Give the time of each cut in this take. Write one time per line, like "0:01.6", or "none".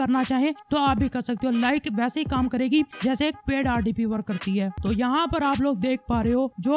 0:04.8